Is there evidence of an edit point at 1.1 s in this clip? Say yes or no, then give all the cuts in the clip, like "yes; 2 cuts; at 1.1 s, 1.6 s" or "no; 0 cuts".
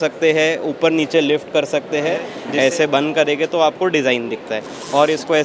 no; 1 cut; at 2.4 s